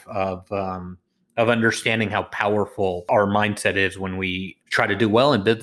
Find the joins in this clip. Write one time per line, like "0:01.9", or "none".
0:03.0
0:04.5